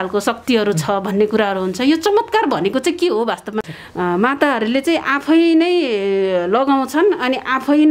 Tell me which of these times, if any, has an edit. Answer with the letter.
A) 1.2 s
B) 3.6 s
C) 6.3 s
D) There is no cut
B